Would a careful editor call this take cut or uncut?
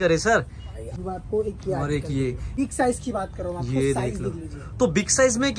cut